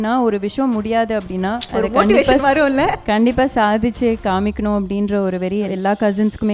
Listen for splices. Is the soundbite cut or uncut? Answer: cut